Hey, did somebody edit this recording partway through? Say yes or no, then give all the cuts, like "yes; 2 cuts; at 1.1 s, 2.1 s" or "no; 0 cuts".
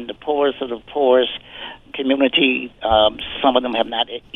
yes; 1 cut; at 1.8 s